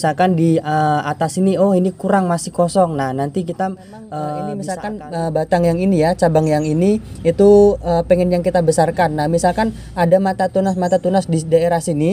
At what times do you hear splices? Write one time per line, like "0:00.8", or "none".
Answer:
0:04.8